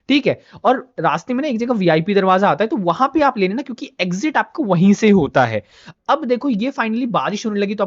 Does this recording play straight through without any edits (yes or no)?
yes